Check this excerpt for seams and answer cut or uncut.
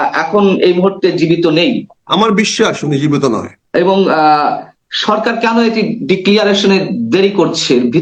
cut